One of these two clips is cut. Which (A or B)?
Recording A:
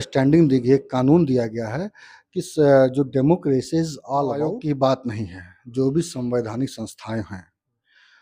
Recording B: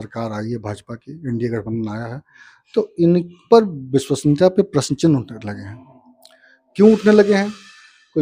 A